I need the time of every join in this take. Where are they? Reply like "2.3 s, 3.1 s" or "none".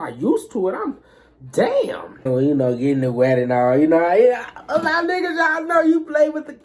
2.3 s